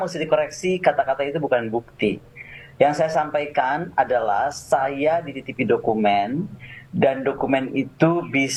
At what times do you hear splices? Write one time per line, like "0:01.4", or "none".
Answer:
none